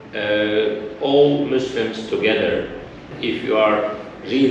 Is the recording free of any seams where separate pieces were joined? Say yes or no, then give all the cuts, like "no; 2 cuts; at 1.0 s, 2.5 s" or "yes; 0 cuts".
no; 1 cut; at 3.1 s